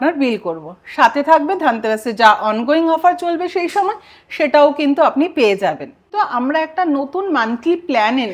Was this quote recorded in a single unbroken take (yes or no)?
no